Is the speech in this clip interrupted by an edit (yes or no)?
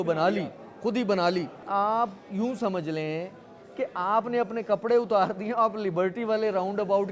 yes